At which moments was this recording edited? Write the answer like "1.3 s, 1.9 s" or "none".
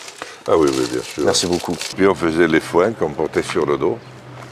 1.9 s